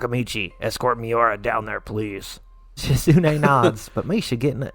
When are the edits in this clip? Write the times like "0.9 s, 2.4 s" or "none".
2.7 s